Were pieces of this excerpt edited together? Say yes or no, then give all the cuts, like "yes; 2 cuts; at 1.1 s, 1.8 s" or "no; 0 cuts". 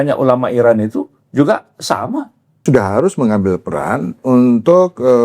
yes; 1 cut; at 2.6 s